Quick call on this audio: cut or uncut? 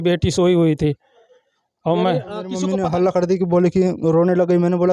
cut